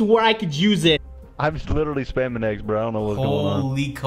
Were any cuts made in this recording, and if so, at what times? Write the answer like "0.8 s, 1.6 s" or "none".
1.1 s